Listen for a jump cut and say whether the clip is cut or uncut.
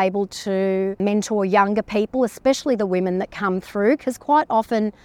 cut